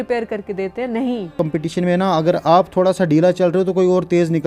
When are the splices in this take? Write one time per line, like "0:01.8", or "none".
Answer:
0:01.3